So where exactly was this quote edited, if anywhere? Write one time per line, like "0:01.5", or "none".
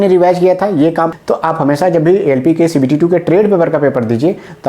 0:01.2